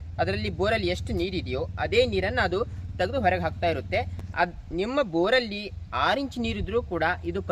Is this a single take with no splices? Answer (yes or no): yes